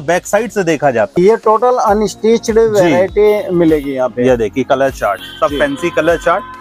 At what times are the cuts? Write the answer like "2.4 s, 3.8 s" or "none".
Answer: 1.2 s